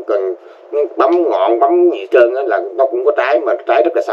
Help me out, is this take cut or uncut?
uncut